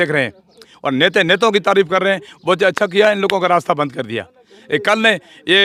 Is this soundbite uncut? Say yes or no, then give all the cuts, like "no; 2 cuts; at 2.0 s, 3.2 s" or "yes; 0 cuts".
yes; 0 cuts